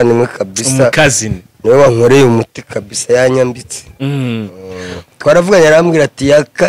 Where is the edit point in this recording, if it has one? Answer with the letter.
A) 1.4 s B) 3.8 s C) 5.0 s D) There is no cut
C